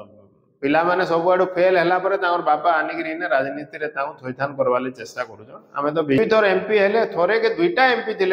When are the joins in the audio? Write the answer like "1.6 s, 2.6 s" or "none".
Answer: 6.2 s